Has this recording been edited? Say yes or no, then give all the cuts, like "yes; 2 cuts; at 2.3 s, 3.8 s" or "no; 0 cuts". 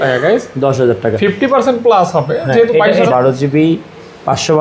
yes; 1 cut; at 2.8 s